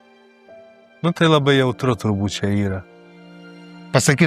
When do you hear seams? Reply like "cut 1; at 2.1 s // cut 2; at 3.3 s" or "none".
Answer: cut 1; at 1.0 s